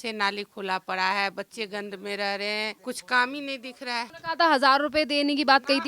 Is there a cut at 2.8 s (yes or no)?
yes